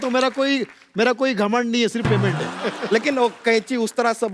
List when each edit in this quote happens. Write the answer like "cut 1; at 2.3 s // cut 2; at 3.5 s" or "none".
cut 1; at 2.6 s